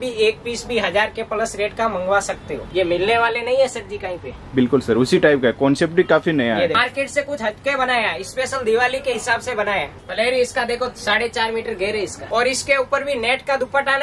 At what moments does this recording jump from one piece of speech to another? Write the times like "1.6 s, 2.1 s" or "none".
2.6 s, 6.8 s, 9.9 s, 12.2 s